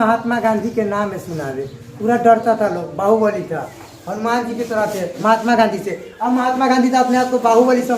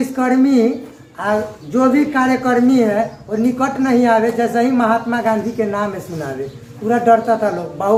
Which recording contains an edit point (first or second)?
first